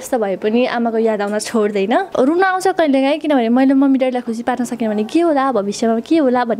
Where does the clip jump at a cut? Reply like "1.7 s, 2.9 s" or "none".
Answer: 2.1 s